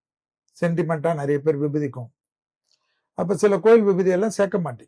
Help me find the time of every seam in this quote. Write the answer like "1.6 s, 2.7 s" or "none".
none